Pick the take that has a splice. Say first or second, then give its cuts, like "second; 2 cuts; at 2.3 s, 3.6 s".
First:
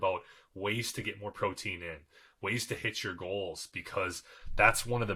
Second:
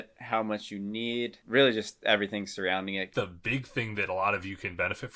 second; 2 cuts; at 1.4 s, 3.1 s